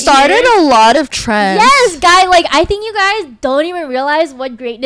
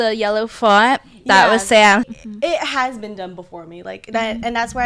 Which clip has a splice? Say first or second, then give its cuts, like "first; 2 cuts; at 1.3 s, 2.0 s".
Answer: second; 1 cut; at 2.1 s